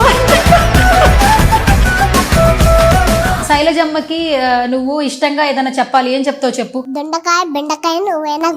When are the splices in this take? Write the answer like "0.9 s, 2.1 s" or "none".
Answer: 3.4 s